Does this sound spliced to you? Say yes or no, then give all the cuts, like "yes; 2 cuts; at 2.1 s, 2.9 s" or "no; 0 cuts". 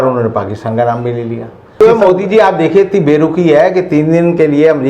yes; 1 cut; at 1.8 s